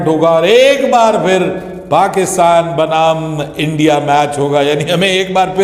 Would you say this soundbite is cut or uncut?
uncut